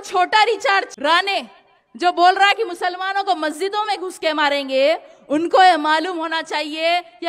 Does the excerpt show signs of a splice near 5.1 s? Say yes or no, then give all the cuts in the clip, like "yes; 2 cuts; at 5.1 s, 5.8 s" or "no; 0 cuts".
no; 1 cut; at 0.9 s